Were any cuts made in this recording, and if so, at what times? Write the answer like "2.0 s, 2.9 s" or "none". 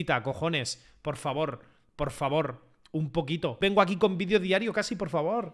3.5 s